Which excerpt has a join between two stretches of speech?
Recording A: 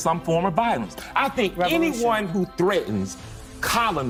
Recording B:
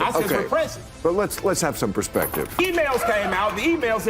B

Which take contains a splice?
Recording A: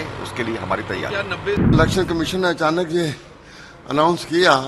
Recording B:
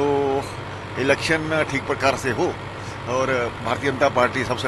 A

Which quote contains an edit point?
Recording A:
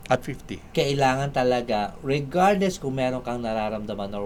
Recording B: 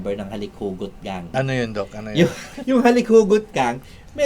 B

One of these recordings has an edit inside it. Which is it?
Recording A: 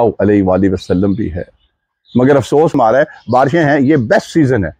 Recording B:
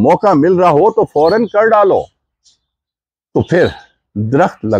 A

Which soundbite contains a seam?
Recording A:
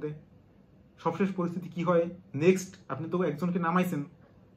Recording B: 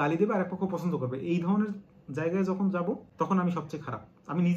B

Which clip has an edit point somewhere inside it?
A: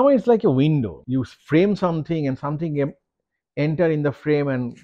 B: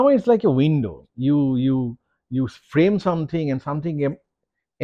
A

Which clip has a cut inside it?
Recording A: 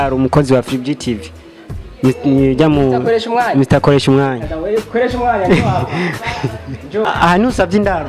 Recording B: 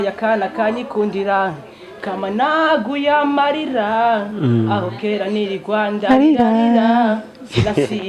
A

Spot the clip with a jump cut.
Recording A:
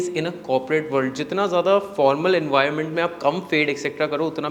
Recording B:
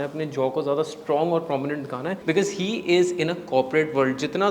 B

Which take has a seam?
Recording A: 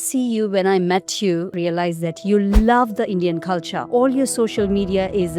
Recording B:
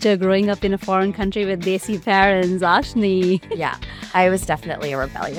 A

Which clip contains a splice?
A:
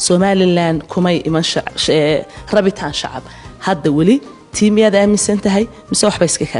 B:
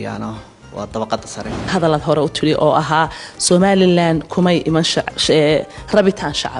B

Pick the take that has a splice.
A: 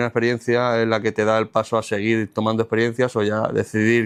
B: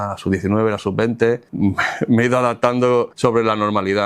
B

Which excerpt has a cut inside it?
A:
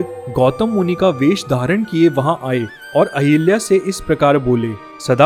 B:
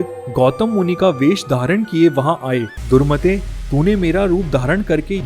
B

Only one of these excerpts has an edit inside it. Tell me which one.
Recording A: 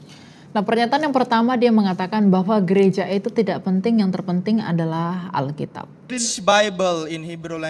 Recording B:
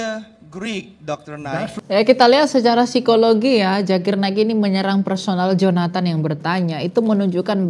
A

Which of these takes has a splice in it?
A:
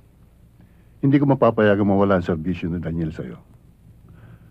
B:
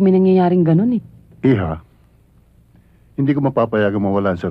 B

